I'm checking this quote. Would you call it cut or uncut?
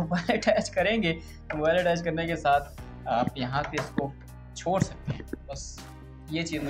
uncut